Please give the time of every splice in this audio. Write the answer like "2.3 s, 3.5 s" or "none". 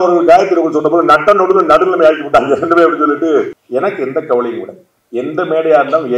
3.6 s